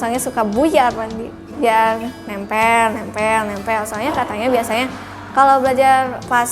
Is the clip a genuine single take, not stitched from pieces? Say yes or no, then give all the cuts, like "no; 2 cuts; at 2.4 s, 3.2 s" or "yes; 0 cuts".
yes; 0 cuts